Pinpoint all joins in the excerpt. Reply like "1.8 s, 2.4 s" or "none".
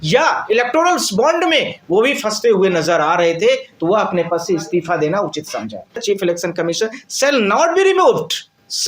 6.0 s

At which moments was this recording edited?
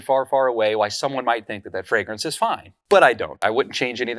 2.7 s, 3.4 s

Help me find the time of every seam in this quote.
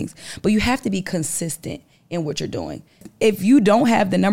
3.1 s

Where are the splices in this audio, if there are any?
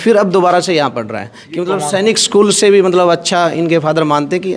none

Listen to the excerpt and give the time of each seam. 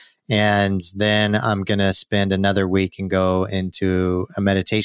none

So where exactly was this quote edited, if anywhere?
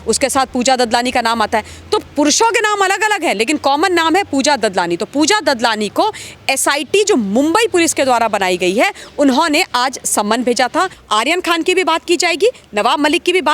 11.0 s

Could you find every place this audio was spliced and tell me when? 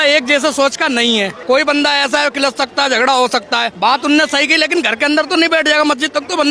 1.3 s, 3.7 s

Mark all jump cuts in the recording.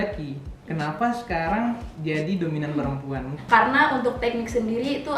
3.3 s

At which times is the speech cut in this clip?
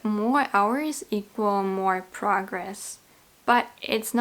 none

